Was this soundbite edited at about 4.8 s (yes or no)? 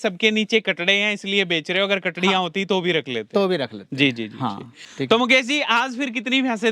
yes